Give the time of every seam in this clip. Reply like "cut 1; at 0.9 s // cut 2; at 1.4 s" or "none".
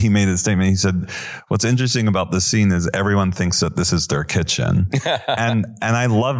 none